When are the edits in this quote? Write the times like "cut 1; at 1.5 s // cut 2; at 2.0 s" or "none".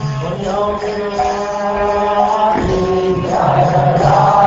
cut 1; at 2.0 s